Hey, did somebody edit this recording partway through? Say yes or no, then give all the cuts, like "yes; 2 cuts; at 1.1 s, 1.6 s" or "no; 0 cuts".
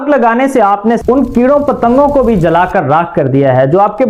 yes; 1 cut; at 1.0 s